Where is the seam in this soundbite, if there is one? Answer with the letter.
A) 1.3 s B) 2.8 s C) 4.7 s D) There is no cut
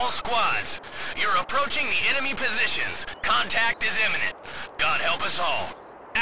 D